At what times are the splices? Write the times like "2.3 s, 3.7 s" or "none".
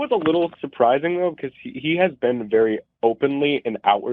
2.9 s